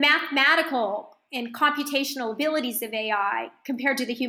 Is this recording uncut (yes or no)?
yes